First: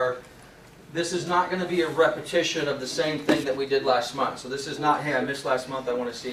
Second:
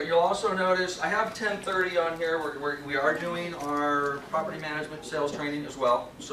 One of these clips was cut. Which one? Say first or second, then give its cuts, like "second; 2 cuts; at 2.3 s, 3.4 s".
second; 1 cut; at 3.8 s